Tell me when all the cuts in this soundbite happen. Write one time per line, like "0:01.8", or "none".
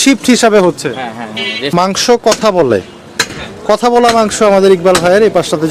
0:01.7